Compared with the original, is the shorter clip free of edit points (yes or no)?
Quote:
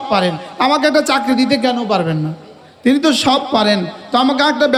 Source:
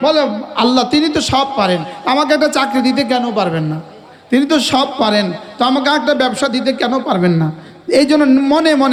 yes